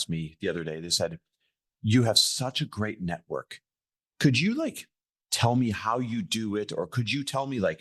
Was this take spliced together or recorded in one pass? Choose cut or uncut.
uncut